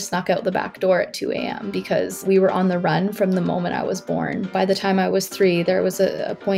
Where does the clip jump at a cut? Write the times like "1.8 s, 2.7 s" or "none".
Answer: 2.2 s, 4.5 s